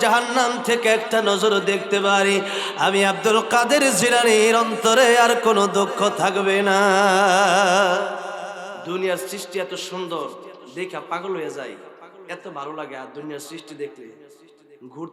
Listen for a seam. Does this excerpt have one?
yes; 1 cut; at 8.8 s

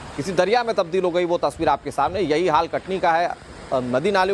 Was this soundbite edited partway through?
no; 0 cuts

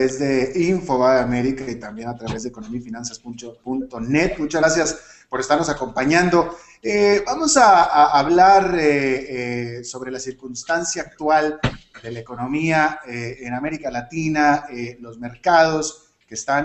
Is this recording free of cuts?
yes; 0 cuts

